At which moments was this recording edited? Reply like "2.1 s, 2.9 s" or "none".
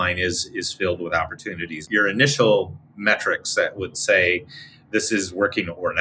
1.8 s